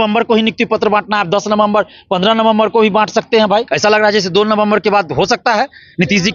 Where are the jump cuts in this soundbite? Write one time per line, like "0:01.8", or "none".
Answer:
0:03.7